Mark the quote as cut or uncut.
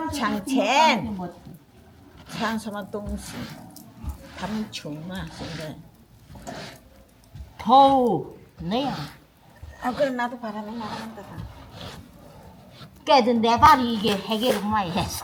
uncut